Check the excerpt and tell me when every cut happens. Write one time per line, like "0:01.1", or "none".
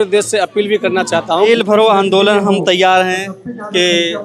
0:01.5